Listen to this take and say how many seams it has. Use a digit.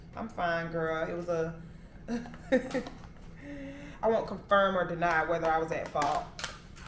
0